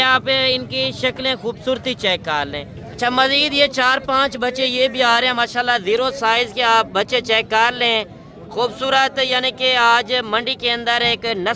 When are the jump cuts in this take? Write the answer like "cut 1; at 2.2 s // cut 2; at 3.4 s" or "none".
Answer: cut 1; at 2.8 s